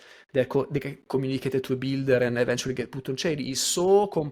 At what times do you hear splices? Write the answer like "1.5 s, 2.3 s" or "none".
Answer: none